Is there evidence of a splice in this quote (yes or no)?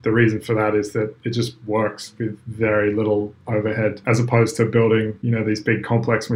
yes